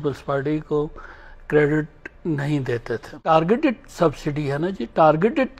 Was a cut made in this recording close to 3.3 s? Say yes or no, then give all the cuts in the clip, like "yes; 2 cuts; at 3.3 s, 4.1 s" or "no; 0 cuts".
yes; 1 cut; at 3.3 s